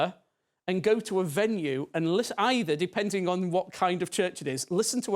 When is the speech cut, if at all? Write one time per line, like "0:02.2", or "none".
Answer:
none